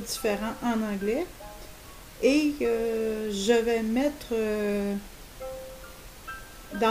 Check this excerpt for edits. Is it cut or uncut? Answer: uncut